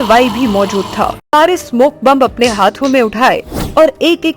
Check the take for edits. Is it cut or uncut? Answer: cut